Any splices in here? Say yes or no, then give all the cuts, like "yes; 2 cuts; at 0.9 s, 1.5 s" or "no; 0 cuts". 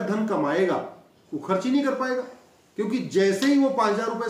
no; 0 cuts